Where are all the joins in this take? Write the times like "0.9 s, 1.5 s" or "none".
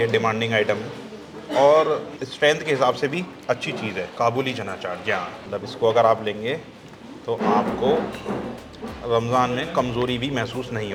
none